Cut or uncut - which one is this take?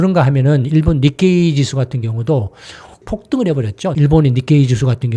cut